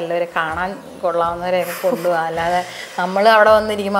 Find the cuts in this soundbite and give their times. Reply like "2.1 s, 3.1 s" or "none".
none